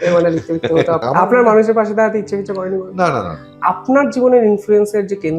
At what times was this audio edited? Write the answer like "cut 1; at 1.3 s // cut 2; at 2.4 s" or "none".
cut 1; at 1.0 s // cut 2; at 3.4 s